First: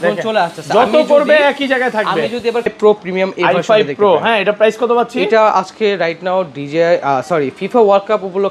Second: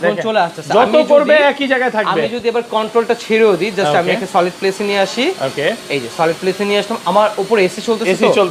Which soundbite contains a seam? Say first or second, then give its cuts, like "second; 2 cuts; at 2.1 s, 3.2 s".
first; 1 cut; at 2.7 s